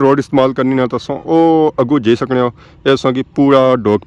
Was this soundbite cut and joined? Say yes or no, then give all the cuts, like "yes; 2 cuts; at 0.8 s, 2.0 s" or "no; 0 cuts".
no; 0 cuts